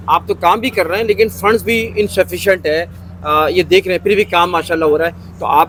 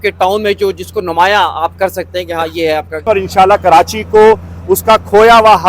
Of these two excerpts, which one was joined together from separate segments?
second; 1 cut; at 3.0 s

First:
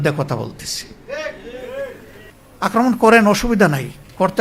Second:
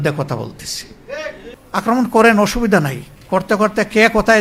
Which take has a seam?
second; 1 cut; at 1.5 s

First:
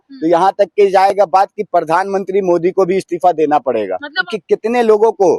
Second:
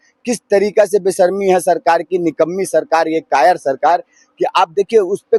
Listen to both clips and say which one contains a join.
first; 1 cut; at 4.3 s

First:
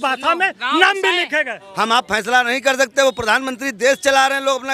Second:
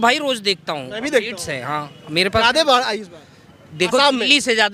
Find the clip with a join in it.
first; 1 cut; at 1.6 s

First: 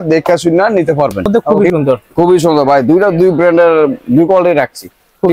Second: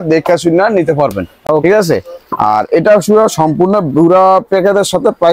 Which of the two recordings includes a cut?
first; 1 cut; at 1.3 s

